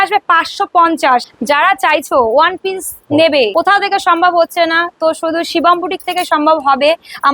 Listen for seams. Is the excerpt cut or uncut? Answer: cut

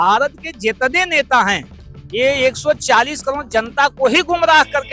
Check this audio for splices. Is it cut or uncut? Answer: uncut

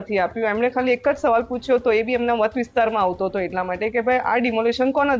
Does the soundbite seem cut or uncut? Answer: uncut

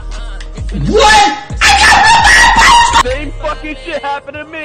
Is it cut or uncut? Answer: cut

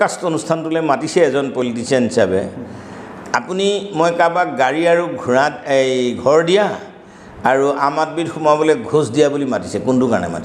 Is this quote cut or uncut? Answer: uncut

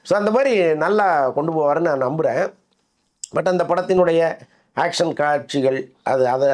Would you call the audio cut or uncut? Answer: uncut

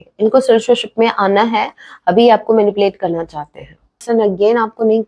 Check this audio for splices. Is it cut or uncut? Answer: cut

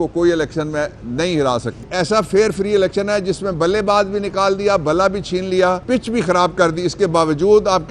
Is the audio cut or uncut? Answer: cut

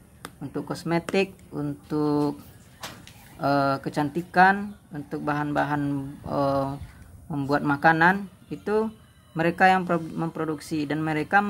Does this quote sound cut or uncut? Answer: uncut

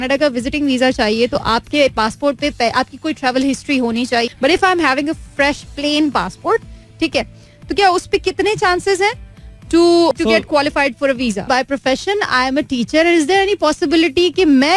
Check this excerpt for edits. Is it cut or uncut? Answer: cut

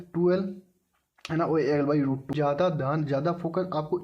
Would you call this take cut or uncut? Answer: cut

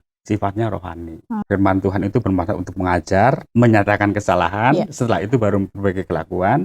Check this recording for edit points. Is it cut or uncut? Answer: cut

